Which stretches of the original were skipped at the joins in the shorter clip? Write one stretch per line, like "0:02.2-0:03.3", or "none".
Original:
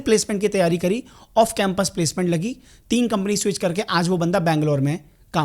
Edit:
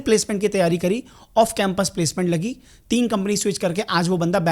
none